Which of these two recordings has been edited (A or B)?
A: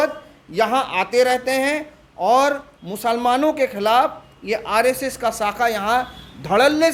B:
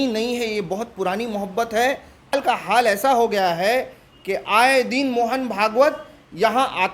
B